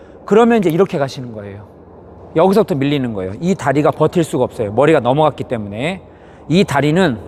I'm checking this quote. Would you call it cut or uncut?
uncut